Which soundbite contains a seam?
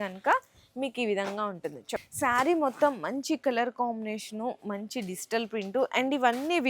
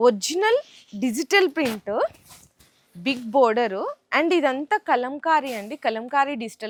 first; 1 cut; at 2.0 s

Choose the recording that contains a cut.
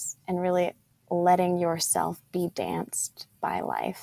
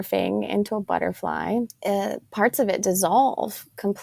second; 1 cut; at 1.7 s

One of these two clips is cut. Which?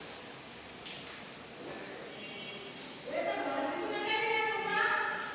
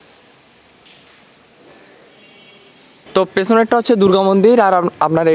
second; 1 cut; at 2.9 s

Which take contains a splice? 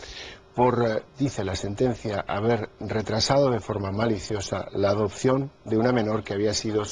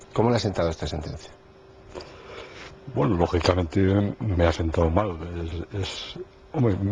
first; 1 cut; at 4.2 s

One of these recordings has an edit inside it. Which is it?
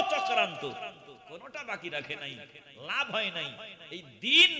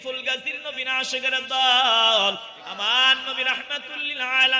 second; 1 cut; at 2.5 s

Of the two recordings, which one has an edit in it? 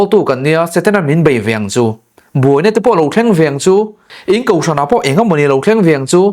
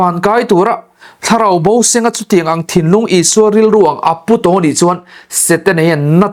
first; 1 cut; at 4.1 s

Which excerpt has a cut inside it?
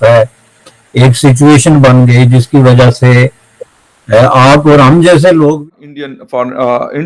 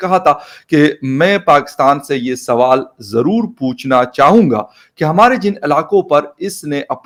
first; 1 cut; at 5.6 s

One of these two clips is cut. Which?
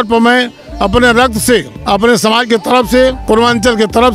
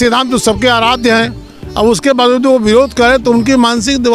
first; 2 cuts; at 1.7 s, 3.2 s

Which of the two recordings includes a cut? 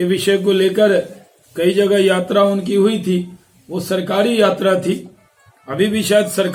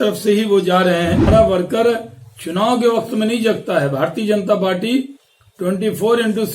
second; 1 cut; at 1.2 s

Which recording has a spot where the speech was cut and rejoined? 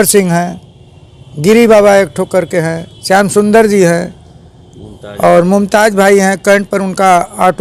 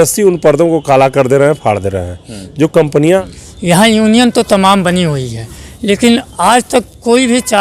second; 1 cut; at 3.2 s

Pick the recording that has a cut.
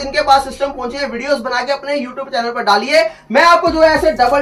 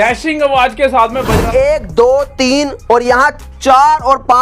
second; 1 cut; at 1.5 s

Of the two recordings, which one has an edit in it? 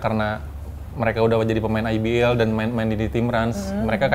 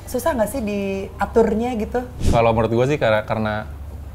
second; 1 cut; at 2.2 s

